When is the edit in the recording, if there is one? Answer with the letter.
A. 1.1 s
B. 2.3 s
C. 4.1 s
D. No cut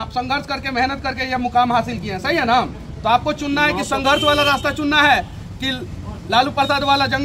D